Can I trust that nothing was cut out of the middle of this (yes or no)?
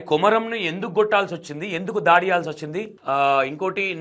yes